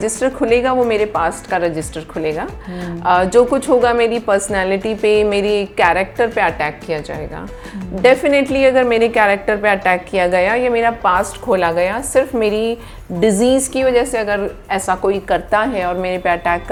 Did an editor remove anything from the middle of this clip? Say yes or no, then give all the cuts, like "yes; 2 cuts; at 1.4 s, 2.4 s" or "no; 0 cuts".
no; 0 cuts